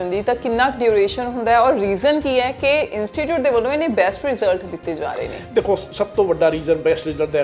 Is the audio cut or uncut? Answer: uncut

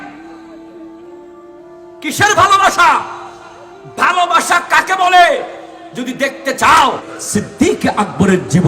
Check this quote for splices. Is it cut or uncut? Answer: cut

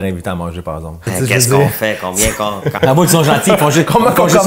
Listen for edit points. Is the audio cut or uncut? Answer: cut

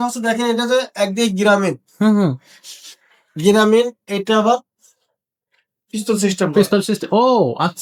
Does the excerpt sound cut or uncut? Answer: uncut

